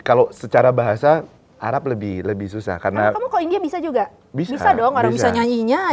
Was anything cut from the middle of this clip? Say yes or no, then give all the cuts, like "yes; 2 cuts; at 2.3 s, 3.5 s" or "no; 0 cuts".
no; 0 cuts